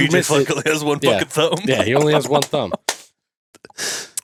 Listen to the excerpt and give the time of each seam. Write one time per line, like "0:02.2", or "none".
none